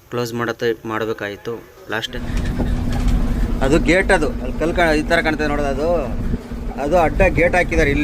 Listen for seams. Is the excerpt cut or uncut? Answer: cut